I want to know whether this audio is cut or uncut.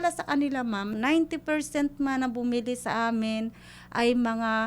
cut